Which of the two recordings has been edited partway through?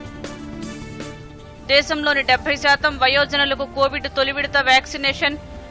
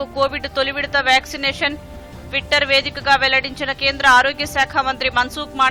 first; 1 cut; at 1.2 s

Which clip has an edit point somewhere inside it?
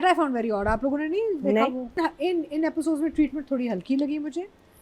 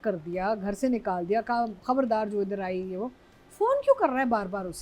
first; 1 cut; at 2.0 s

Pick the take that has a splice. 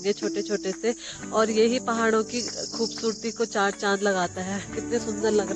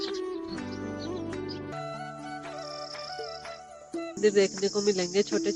second; 2 cuts; at 1.7 s, 4.2 s

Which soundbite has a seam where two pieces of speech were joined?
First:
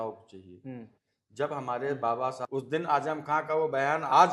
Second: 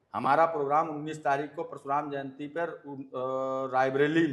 first; 1 cut; at 2.4 s

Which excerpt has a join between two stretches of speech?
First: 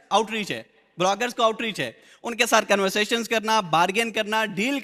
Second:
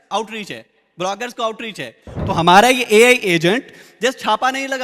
second; 1 cut; at 2.1 s

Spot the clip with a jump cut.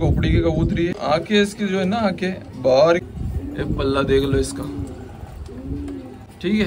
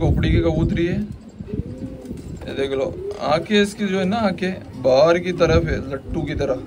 first; 2 cuts; at 0.9 s, 3.1 s

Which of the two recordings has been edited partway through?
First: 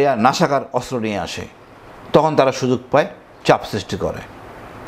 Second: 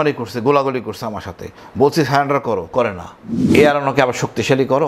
second; 1 cut; at 3.3 s

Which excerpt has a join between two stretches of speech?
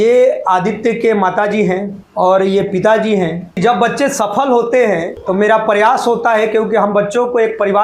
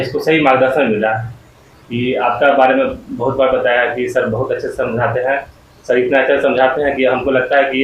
first; 3 cuts; at 2.0 s, 3.6 s, 5.1 s

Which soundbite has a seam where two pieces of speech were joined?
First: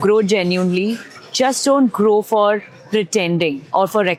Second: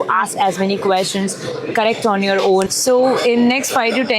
second; 1 cut; at 2.7 s

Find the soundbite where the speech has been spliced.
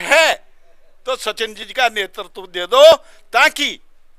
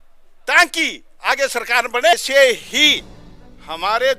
second; 1 cut; at 2.1 s

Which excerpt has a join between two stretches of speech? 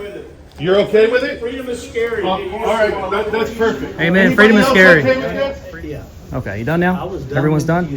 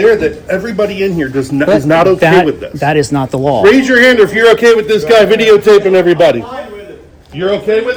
first; 1 cut; at 5.6 s

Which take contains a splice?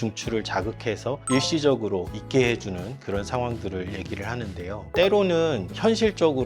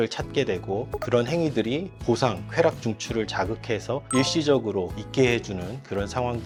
first; 1 cut; at 4.9 s

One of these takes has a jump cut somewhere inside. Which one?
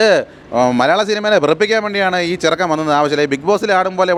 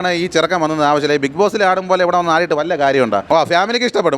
second; 1 cut; at 3.2 s

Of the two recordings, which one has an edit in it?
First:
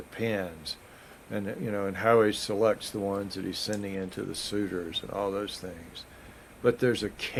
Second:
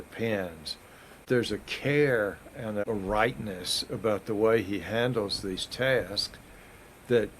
second; 2 cuts; at 1.2 s, 2.8 s

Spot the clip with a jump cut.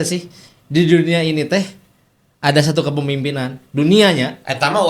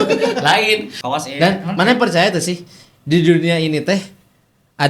second; 1 cut; at 0.9 s

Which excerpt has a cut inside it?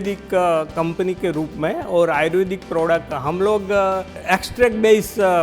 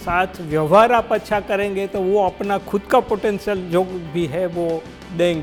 first; 1 cut; at 4.1 s

